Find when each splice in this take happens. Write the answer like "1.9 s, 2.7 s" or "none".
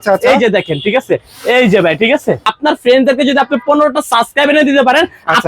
2.5 s